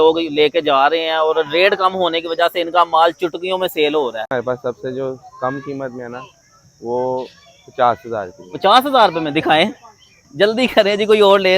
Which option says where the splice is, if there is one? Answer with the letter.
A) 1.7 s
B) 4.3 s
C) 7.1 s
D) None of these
B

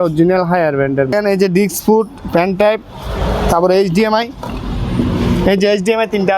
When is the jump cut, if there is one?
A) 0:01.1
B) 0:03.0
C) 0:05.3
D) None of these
A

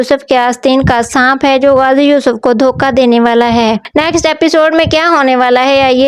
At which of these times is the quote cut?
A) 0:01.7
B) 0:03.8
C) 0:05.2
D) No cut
B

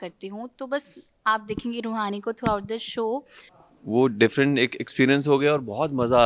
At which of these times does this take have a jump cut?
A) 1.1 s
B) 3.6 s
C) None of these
B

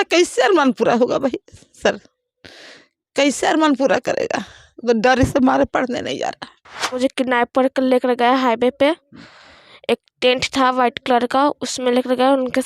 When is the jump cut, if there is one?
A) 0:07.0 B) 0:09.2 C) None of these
A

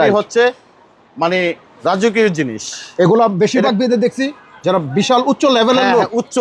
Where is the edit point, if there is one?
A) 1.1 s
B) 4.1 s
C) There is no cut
C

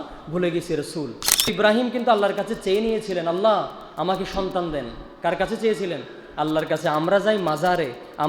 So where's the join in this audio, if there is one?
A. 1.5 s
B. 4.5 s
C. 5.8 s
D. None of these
A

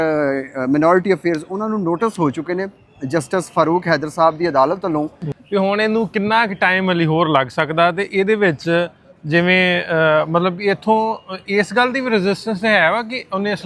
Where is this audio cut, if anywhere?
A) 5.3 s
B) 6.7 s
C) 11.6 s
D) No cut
A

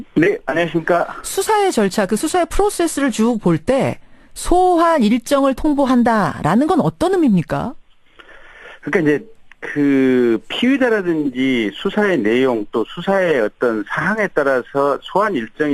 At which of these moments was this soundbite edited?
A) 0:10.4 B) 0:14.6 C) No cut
B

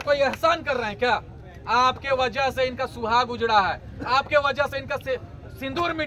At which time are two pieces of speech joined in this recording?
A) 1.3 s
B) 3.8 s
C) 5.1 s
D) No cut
D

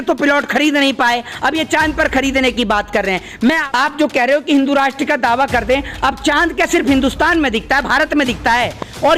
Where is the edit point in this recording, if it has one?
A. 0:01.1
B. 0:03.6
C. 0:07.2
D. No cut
B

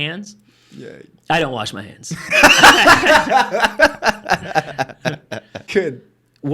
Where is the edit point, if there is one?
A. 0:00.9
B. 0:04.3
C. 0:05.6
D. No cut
C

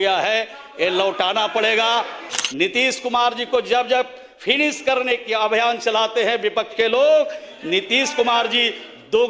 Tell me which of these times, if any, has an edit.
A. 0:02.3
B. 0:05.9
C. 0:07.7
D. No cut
A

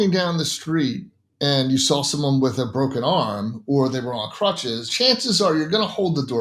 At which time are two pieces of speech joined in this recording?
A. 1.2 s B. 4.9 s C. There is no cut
B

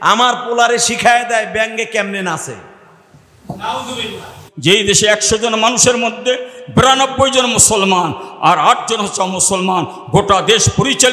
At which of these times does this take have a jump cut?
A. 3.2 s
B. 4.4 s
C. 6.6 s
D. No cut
B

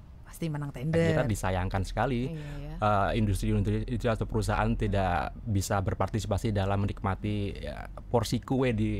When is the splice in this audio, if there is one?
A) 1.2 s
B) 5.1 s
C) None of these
A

